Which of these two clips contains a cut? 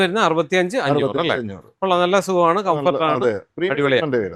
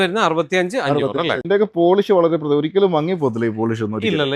second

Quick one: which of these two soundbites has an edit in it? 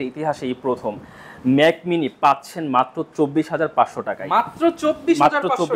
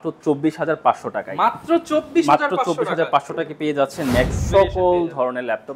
second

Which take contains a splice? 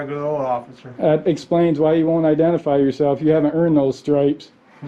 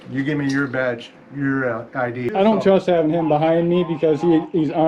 second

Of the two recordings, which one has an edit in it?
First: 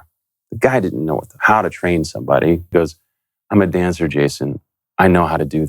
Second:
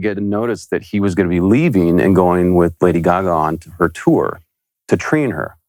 first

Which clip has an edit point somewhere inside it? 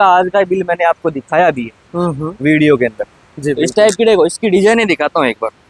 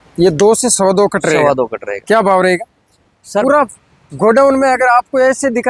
second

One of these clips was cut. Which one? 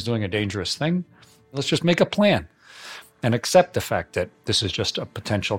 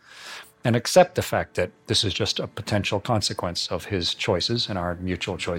first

